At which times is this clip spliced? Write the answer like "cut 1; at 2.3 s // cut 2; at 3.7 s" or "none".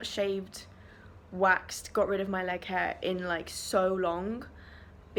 none

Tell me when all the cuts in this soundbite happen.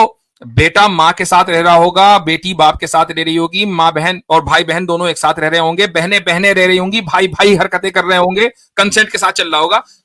none

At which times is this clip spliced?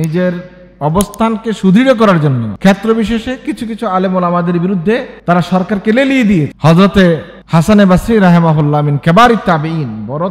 cut 1; at 2.5 s // cut 2; at 5.1 s // cut 3; at 6.5 s

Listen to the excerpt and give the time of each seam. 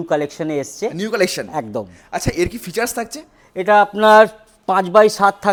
none

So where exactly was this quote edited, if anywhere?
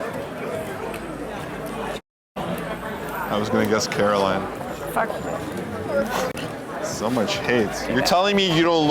none

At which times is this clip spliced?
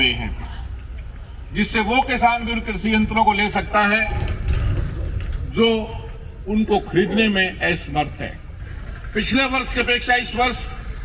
cut 1; at 8.5 s

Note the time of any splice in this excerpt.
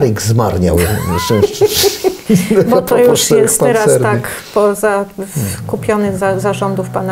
none

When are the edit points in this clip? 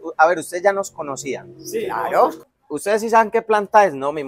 cut 1; at 2.5 s

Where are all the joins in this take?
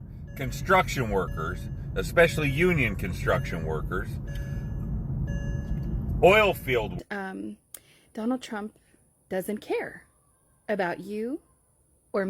cut 1; at 6.9 s

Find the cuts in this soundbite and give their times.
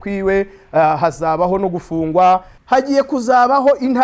cut 1; at 2.5 s

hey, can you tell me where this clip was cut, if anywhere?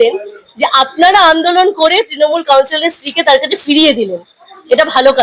none

